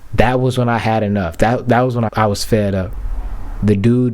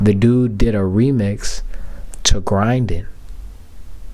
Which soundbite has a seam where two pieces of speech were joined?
first; 1 cut; at 2.1 s

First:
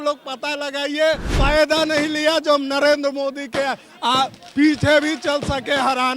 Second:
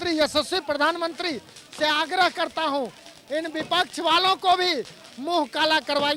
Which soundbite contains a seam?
first; 1 cut; at 1.3 s

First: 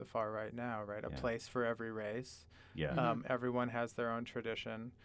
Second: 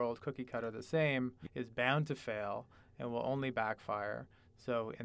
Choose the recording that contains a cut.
second; 1 cut; at 1.4 s

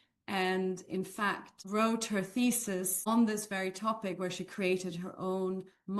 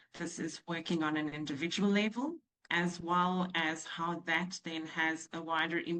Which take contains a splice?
first; 2 cuts; at 1.5 s, 3.0 s

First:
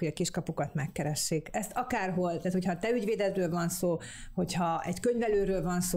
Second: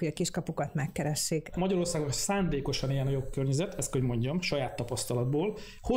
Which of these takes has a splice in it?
second; 1 cut; at 1.5 s

